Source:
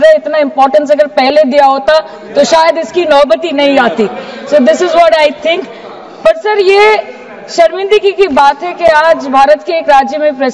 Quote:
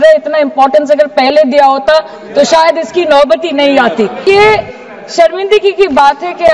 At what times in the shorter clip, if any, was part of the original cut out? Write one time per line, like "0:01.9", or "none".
0:04.2